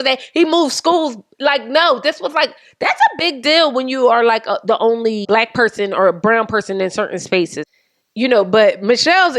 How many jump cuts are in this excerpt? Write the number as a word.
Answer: two